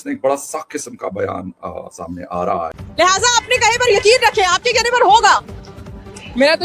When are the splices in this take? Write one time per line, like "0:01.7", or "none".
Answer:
0:02.8